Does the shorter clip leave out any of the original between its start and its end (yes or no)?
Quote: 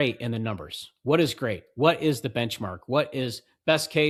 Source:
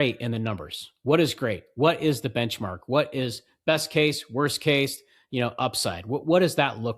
no